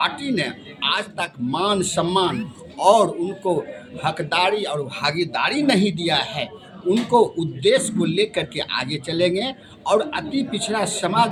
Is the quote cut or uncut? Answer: uncut